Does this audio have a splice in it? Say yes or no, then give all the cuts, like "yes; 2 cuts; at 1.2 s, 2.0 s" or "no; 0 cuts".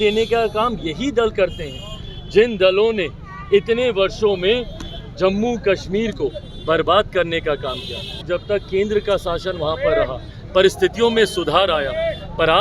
yes; 1 cut; at 8.3 s